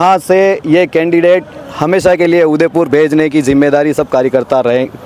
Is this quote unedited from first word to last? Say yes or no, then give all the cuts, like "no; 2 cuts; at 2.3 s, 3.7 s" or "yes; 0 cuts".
yes; 0 cuts